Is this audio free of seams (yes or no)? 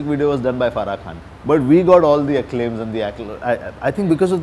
yes